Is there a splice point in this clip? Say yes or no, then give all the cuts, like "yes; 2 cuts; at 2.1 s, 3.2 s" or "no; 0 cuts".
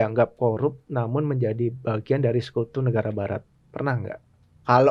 no; 0 cuts